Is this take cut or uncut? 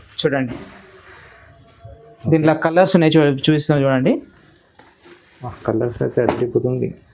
uncut